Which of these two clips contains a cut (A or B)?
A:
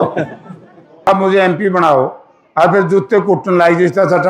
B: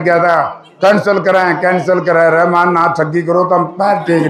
A